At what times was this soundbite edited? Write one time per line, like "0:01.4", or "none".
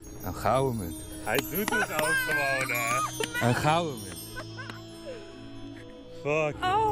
none